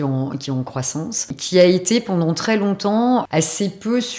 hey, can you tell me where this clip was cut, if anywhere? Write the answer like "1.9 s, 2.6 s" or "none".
1.4 s, 3.3 s